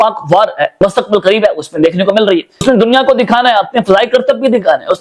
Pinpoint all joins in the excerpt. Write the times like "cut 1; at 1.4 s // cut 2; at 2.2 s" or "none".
cut 1; at 0.8 s // cut 2; at 2.6 s